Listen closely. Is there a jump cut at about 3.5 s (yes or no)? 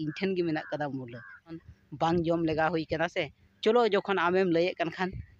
no